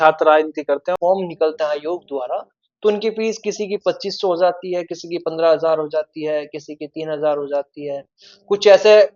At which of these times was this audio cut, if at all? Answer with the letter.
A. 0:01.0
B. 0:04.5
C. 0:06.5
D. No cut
A